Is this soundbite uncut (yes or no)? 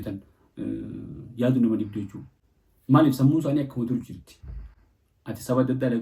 yes